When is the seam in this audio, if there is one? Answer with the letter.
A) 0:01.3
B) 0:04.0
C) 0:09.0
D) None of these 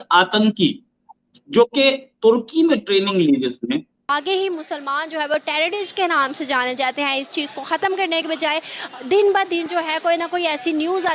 B